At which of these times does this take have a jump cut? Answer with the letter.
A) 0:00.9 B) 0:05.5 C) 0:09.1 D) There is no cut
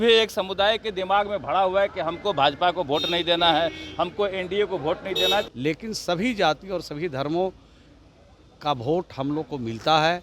B